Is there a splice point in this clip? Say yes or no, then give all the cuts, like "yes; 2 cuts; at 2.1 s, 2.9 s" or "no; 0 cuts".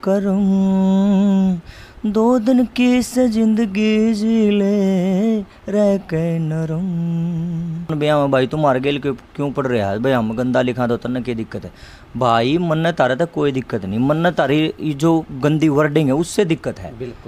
yes; 1 cut; at 7.9 s